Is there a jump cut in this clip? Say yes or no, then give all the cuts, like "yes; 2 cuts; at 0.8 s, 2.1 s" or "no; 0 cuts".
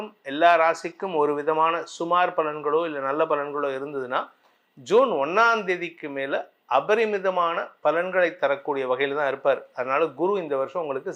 no; 0 cuts